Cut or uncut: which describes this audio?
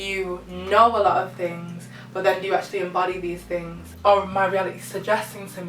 cut